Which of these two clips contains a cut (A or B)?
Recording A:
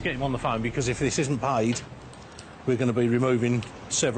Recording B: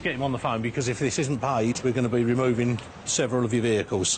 B